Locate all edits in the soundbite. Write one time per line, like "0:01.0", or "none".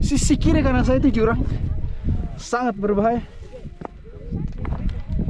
none